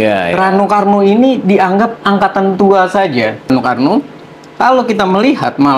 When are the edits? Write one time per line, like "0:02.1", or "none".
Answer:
0:03.5